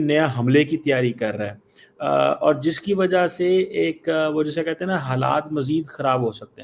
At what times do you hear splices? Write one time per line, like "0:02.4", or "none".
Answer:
none